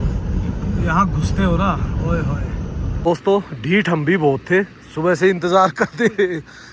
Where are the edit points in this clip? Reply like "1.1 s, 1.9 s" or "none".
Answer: 2.9 s